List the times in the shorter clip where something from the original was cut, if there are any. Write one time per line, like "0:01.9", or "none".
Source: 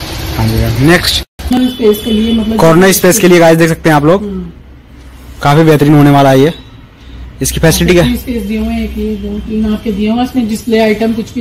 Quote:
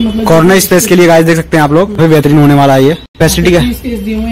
0:02.0
0:03.1